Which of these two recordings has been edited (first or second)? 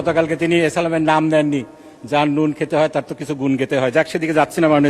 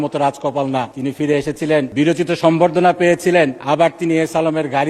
second